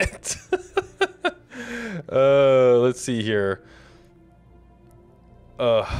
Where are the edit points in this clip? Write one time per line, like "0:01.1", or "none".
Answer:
none